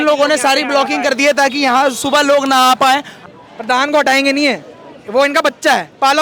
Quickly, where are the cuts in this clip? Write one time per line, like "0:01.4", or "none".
0:03.2